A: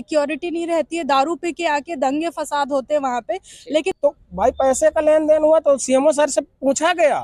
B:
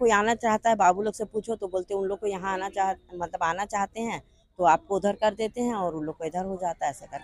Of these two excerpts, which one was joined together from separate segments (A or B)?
A